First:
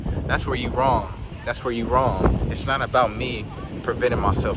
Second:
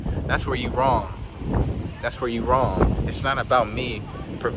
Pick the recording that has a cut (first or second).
first